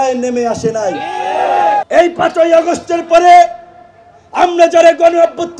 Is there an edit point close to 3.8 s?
no; 1 cut; at 1.8 s

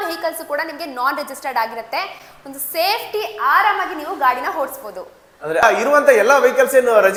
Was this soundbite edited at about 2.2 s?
no; 0 cuts

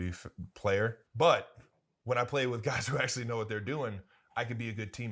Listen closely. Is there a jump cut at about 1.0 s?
yes; 1 cut; at 1.0 s

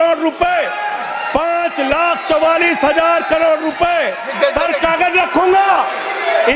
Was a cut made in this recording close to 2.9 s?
no; 1 cut; at 4.3 s

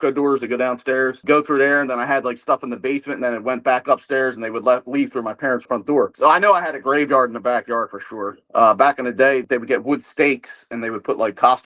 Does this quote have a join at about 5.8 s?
no; 1 cut; at 9.4 s

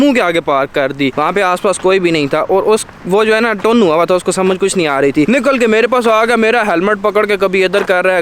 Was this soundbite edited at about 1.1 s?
yes; 2 cuts; at 1.1 s, 5.3 s

